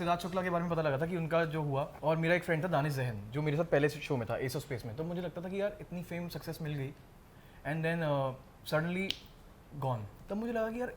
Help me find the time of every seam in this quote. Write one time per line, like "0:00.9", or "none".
0:01.9
0:08.5
0:10.1